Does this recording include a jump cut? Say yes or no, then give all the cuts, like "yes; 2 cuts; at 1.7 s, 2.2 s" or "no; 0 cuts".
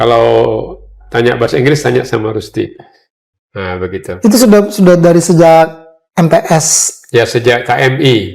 no; 0 cuts